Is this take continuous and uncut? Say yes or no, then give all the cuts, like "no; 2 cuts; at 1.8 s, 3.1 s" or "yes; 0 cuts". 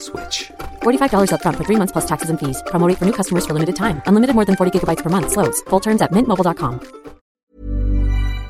no; 1 cut; at 7.5 s